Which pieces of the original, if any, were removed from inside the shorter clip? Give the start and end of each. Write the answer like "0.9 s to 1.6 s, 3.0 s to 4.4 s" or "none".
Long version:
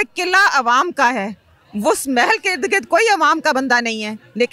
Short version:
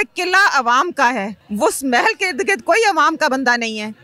1.4 s to 1.6 s